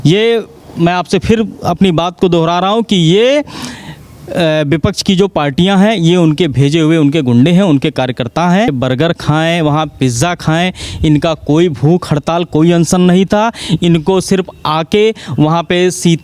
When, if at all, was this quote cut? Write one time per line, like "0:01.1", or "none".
0:08.7

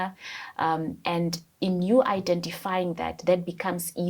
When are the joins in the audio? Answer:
none

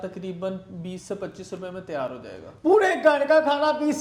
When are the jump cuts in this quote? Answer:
none

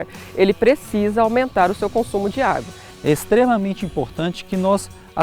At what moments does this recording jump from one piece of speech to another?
none

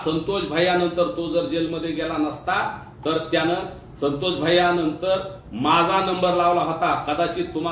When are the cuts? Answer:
none

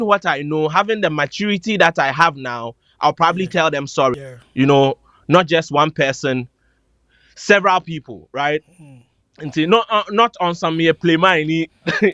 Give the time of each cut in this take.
0:04.2

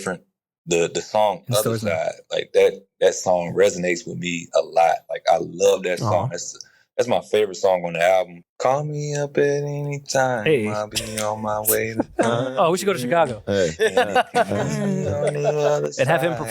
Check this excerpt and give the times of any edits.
0:08.4

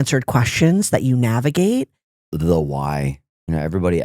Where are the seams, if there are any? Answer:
0:02.3

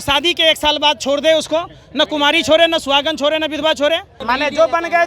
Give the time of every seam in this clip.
0:04.1

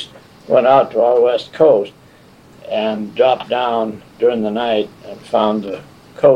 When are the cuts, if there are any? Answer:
none

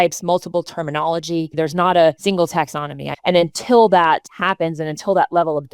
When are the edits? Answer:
0:01.5
0:02.8
0:04.3

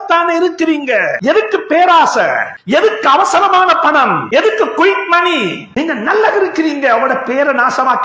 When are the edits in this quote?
0:01.2
0:02.5
0:04.2
0:05.6

